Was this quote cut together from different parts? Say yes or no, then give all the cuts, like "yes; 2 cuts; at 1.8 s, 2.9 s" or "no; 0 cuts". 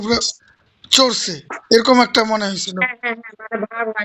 no; 0 cuts